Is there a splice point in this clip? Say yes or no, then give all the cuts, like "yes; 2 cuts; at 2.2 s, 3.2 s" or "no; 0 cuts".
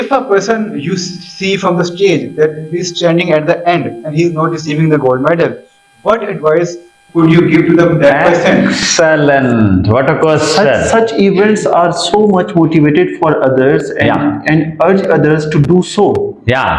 no; 0 cuts